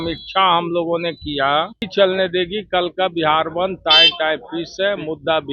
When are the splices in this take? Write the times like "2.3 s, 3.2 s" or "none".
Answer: 1.9 s